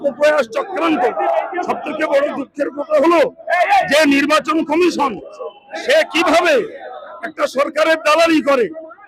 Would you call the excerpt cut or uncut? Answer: uncut